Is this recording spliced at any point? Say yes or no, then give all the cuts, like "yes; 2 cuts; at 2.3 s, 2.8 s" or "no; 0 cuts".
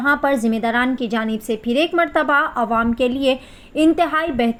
no; 0 cuts